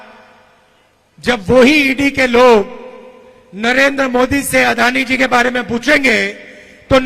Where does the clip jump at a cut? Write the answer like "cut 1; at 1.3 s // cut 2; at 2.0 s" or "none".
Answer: none